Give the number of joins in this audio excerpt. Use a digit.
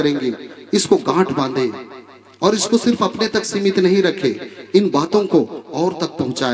0